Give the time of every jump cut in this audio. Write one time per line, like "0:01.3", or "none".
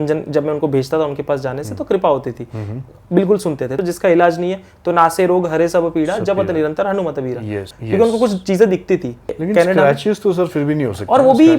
0:03.8
0:07.7
0:09.4